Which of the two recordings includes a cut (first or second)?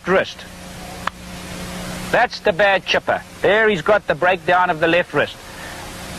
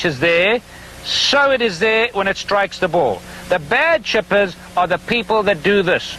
first